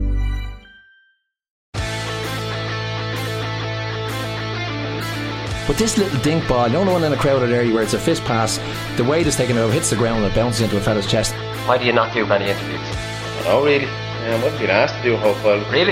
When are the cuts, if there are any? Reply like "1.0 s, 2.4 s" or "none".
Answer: 1.6 s